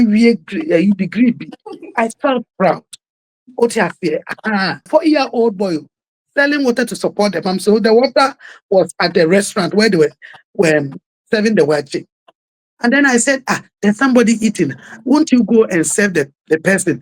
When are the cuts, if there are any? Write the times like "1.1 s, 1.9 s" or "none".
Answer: 4.9 s